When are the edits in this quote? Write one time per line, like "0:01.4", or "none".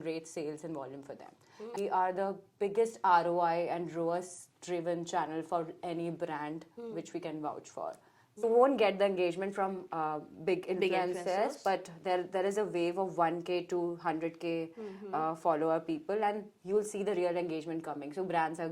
0:01.8
0:08.4